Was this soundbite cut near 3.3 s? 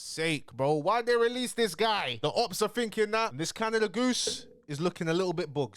yes; 1 cut; at 3.3 s

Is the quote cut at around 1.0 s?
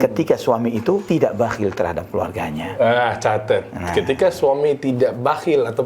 yes; 1 cut; at 1.0 s

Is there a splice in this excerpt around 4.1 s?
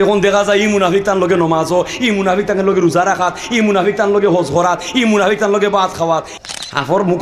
no; 1 cut; at 6.3 s

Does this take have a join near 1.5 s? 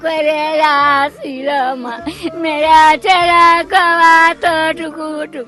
no; 0 cuts

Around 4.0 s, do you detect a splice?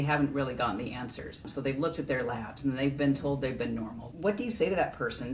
yes; 2 cuts; at 1.5 s, 4.0 s

